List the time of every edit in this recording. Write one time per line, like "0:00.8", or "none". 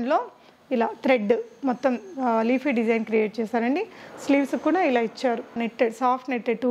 0:05.6